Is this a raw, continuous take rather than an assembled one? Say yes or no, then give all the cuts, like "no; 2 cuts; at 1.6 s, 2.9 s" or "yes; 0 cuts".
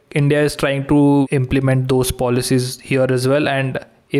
no; 1 cut; at 1.3 s